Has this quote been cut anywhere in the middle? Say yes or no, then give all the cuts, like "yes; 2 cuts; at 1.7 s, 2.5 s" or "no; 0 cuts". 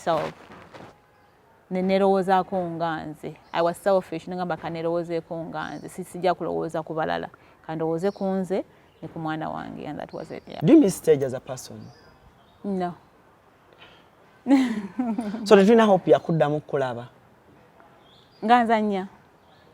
yes; 1 cut; at 10.6 s